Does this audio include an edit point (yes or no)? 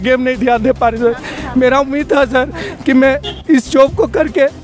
no